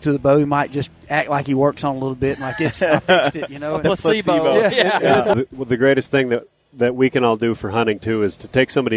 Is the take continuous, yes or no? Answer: no